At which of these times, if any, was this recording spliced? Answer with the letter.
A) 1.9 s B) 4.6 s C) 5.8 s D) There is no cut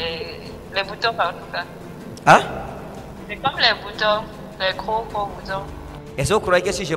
C